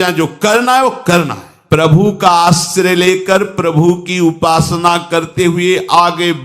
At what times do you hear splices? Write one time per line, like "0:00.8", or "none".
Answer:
0:01.5